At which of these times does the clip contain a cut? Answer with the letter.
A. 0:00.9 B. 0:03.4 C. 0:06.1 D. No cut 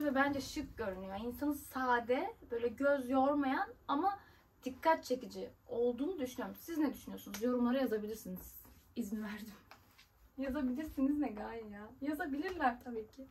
D